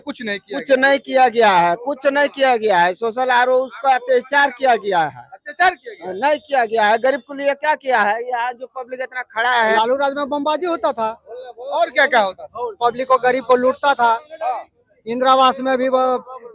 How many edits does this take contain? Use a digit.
2